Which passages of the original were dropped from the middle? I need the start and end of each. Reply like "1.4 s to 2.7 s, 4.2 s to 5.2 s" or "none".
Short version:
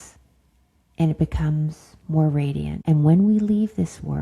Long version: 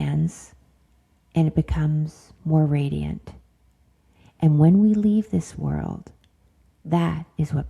3.1 s to 4.3 s